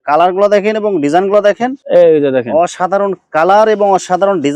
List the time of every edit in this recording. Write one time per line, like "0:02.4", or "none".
0:01.8